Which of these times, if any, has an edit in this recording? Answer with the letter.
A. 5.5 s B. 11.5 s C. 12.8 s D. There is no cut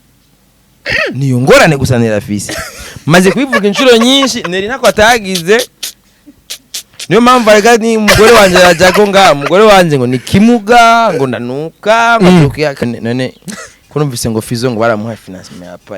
C